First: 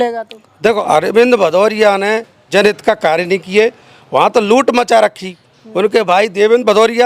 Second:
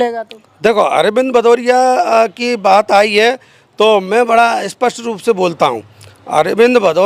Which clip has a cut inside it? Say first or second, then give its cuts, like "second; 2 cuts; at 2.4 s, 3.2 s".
first; 2 cuts; at 0.8 s, 2.5 s